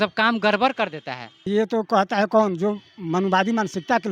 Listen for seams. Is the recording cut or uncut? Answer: cut